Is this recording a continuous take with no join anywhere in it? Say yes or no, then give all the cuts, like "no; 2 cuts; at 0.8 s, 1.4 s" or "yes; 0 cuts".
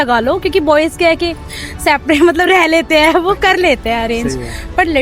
yes; 0 cuts